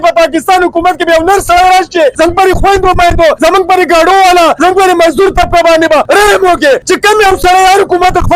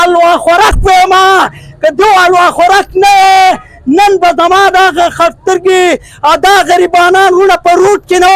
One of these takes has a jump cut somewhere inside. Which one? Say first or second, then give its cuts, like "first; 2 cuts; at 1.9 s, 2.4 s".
first; 5 cuts; at 2.1 s, 3.4 s, 4.5 s, 6.0 s, 6.8 s